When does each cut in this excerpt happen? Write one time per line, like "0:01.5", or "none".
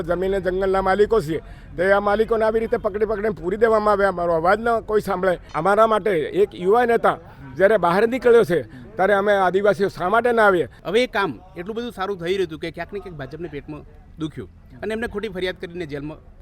0:05.5
0:10.8

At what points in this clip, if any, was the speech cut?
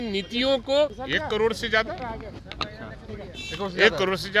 0:01.0

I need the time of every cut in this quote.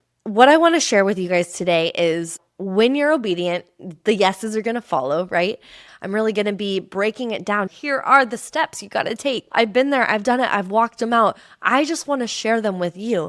0:05.8
0:07.7
0:09.5

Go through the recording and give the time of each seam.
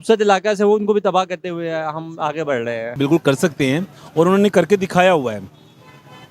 0:03.0

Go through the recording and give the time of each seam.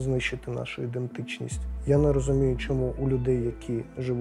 0:01.7

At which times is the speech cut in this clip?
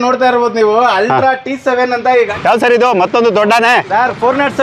0:02.3

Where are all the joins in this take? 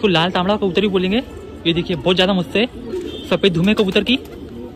none

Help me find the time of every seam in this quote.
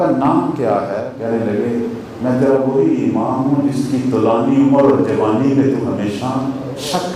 0:01.1

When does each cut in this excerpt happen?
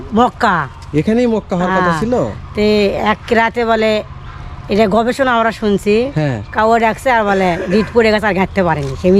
none

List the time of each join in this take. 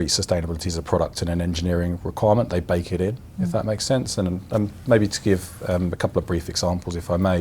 none

